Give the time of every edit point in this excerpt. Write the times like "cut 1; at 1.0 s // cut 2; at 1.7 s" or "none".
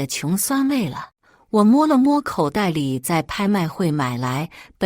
cut 1; at 1.1 s